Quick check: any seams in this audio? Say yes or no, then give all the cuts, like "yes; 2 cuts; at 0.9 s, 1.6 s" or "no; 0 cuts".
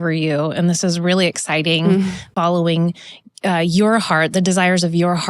yes; 1 cut; at 2.3 s